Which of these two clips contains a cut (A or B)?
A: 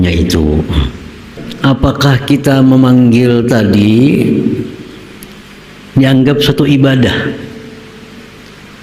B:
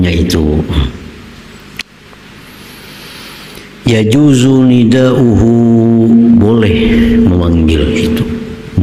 A